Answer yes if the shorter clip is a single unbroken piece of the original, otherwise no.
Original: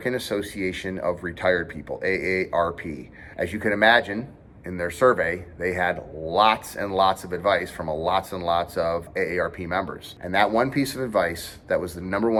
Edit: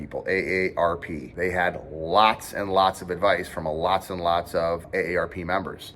no